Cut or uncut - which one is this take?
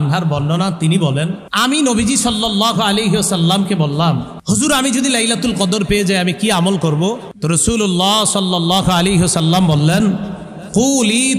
cut